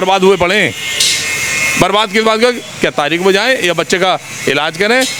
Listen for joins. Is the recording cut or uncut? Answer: uncut